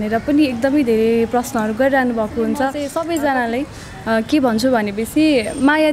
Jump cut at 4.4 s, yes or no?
no